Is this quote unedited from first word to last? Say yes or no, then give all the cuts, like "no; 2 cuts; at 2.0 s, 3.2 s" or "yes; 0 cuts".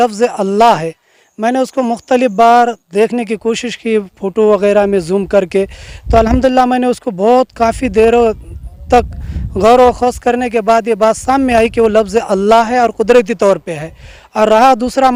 yes; 0 cuts